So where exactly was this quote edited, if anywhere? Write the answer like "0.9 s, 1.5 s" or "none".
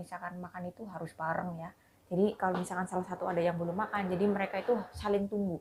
none

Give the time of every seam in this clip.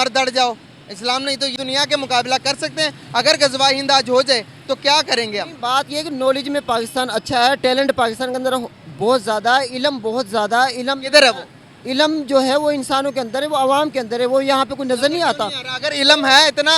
1.5 s

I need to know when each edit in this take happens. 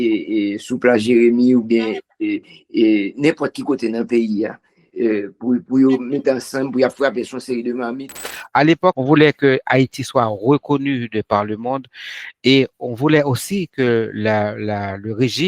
8.6 s

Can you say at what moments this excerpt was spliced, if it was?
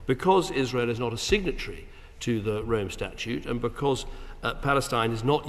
none

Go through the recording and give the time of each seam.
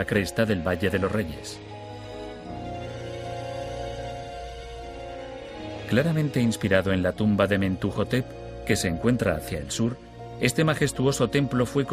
1.2 s

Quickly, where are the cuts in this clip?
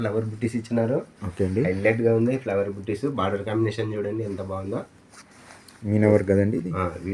none

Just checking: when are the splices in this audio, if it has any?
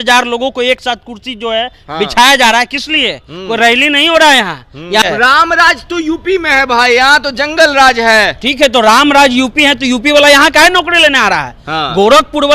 5.0 s

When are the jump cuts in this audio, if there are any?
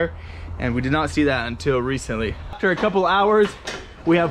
2.6 s

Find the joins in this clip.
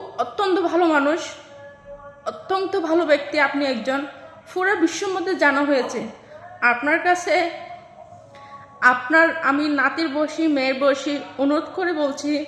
none

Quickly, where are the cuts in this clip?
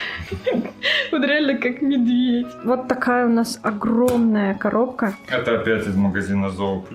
2.5 s

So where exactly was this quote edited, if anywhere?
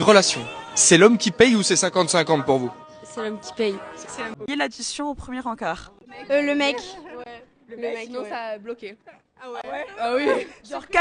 4.4 s

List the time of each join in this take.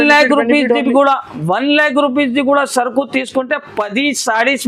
none

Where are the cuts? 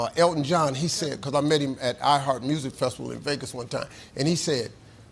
3.1 s

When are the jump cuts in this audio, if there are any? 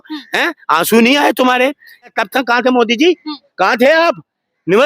2.2 s

